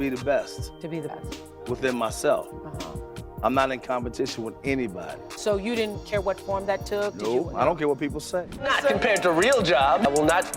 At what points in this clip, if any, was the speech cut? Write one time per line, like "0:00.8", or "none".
0:08.7